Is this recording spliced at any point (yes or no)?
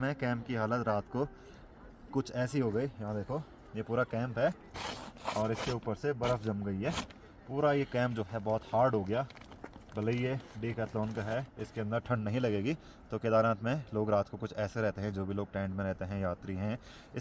no